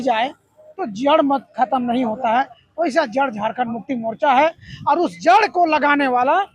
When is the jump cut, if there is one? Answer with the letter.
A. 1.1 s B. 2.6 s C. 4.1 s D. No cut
D